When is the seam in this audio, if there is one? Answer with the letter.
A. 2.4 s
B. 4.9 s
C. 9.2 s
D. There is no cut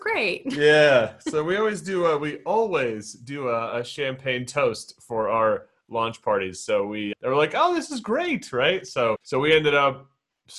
C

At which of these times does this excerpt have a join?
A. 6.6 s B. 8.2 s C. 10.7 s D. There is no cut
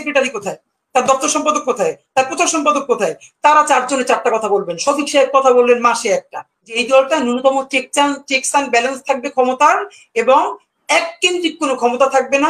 A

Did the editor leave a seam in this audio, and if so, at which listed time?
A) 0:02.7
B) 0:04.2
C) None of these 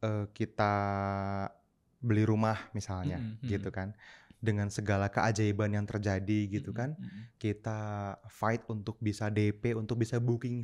C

